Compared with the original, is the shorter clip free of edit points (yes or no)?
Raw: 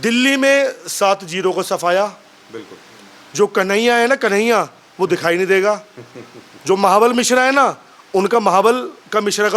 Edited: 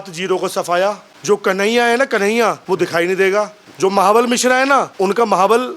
no